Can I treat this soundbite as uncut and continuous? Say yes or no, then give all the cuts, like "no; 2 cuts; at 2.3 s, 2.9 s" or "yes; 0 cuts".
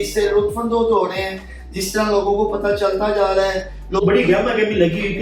no; 1 cut; at 4.0 s